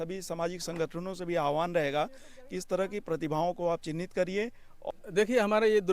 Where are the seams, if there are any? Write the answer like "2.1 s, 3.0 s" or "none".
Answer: 4.7 s